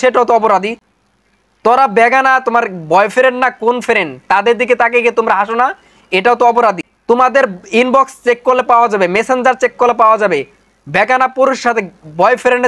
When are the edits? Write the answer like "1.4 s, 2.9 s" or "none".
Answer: 1.0 s, 6.9 s